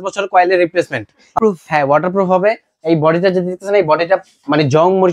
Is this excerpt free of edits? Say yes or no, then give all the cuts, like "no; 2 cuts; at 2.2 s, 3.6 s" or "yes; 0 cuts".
no; 1 cut; at 1.3 s